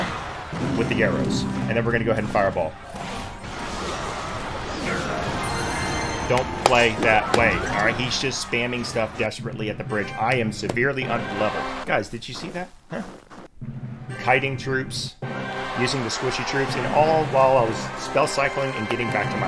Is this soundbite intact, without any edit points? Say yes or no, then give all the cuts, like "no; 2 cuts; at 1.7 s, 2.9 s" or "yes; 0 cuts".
no; 2 cuts; at 3.5 s, 11.8 s